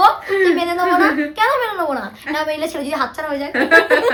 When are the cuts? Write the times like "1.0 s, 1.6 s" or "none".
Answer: none